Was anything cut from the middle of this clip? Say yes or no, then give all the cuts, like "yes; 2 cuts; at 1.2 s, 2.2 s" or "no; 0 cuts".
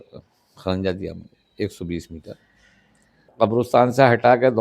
yes; 1 cut; at 3.3 s